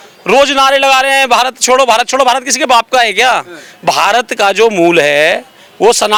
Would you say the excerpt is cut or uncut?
uncut